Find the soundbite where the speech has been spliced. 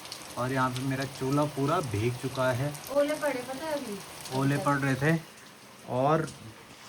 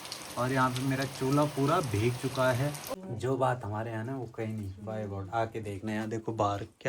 second; 1 cut; at 2.8 s

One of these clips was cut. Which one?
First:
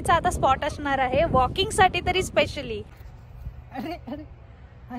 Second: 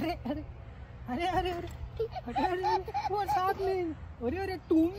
first; 1 cut; at 2.9 s

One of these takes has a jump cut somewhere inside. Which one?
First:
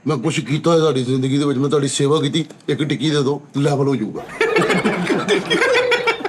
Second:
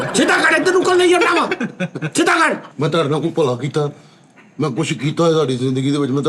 second; 1 cut; at 2.7 s

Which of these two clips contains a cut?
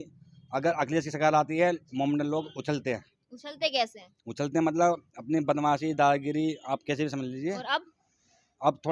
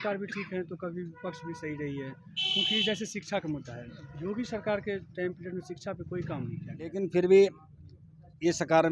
second; 1 cut; at 6.9 s

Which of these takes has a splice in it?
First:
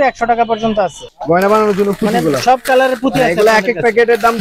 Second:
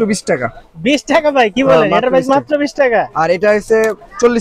first; 1 cut; at 1.1 s

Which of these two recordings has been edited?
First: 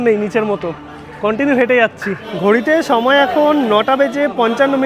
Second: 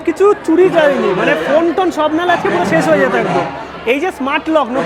first; 1 cut; at 2.3 s

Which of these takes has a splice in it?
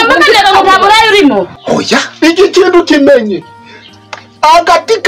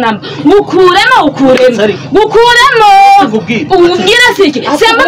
first; 1 cut; at 1.5 s

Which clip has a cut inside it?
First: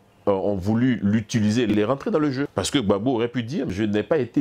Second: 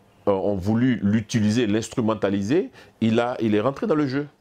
first; 3 cuts; at 1.7 s, 2.5 s, 3.7 s

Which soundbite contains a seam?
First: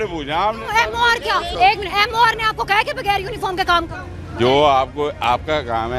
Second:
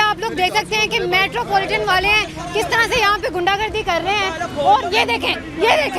first; 1 cut; at 1.5 s

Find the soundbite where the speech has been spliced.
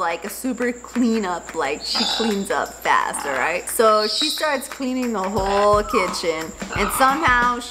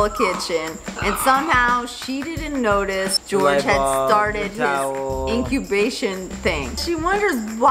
second; 2 cuts; at 3.2 s, 6.8 s

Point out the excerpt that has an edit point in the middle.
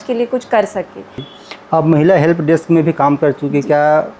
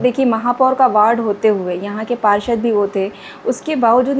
first; 1 cut; at 1.3 s

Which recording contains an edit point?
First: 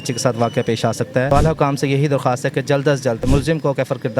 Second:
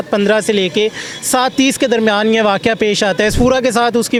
first; 2 cuts; at 1.3 s, 3.3 s

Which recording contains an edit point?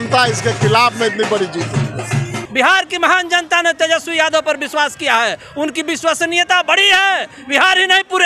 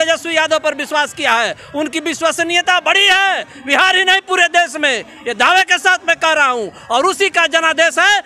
first; 1 cut; at 2.4 s

